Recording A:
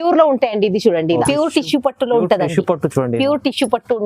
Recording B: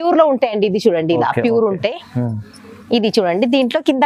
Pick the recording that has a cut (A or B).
A